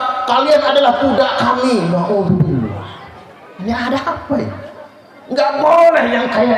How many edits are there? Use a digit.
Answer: 0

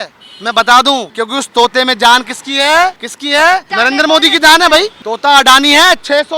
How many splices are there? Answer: 4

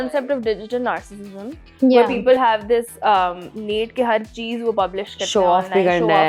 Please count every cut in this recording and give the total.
0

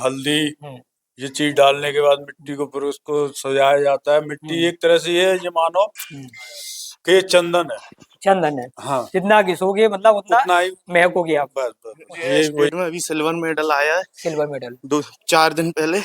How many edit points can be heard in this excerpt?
1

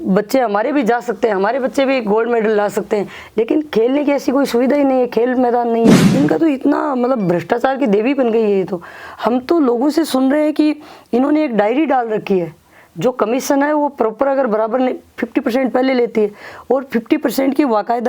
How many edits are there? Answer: 1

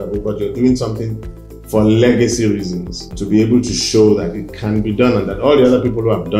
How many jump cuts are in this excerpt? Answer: 1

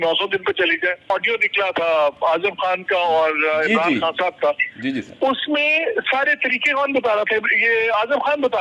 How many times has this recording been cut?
1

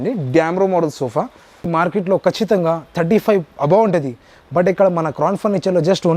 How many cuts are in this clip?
1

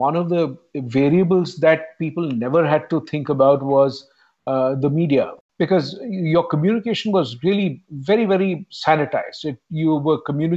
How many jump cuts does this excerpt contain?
1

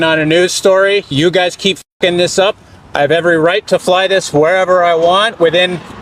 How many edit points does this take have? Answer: 0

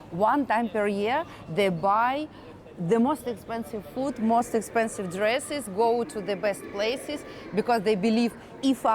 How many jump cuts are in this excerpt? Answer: 0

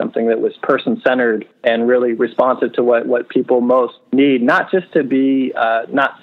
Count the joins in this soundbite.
2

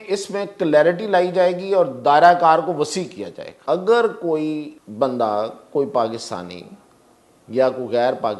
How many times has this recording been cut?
2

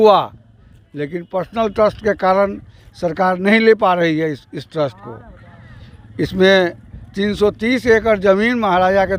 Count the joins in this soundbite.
0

